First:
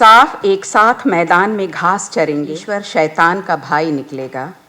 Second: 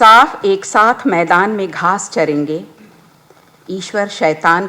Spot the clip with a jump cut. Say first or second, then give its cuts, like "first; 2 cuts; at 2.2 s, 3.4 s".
first; 1 cut; at 2.6 s